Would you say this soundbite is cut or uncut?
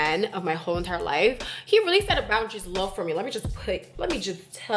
uncut